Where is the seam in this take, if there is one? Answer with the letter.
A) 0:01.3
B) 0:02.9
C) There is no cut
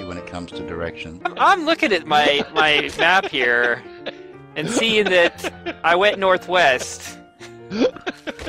A